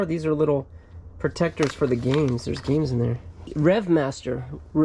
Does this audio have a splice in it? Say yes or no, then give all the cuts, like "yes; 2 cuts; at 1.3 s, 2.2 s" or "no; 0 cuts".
yes; 1 cut; at 3.4 s